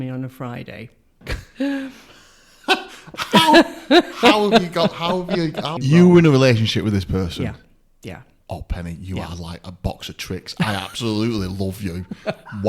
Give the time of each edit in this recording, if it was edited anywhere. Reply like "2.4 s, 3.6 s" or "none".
1.3 s, 5.7 s